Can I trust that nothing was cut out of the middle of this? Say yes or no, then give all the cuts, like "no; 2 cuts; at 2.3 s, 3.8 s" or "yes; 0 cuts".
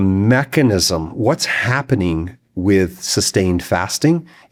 yes; 0 cuts